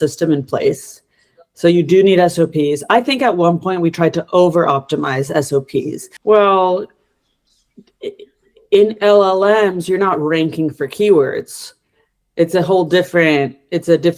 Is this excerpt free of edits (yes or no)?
no